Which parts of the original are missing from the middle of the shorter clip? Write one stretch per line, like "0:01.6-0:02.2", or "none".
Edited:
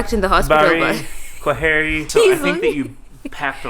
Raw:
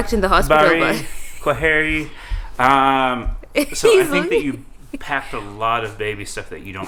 0:02.0-0:03.7